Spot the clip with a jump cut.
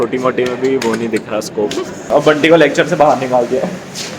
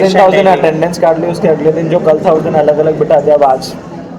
first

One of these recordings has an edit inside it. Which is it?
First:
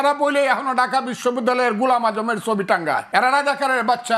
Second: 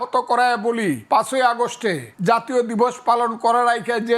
second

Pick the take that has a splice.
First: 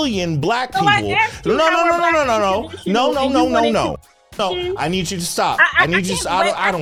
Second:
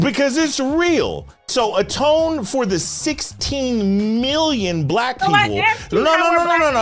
second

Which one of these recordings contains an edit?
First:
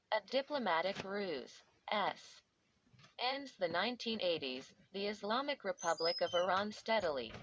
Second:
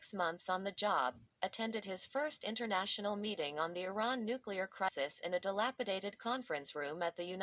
second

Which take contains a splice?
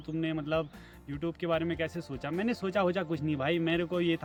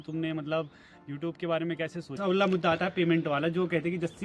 second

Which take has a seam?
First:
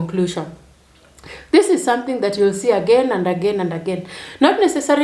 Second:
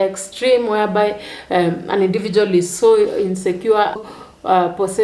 second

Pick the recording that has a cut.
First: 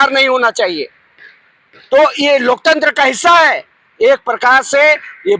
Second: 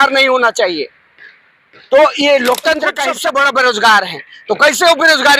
second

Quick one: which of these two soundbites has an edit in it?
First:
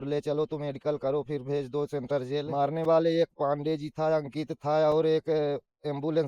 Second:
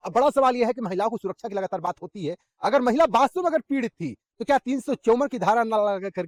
first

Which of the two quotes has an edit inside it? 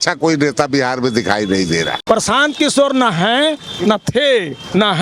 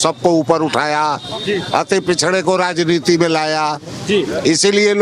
first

